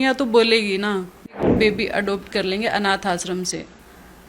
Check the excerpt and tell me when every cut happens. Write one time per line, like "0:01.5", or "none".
0:01.4